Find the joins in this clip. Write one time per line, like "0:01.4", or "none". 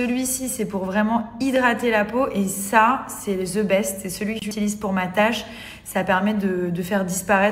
0:04.5